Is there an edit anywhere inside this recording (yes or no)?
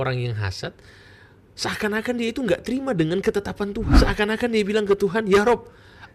yes